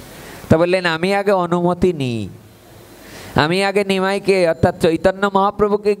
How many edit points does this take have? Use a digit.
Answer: 0